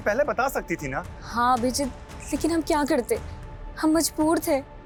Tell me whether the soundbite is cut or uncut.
uncut